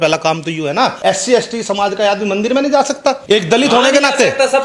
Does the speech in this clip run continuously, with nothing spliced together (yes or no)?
no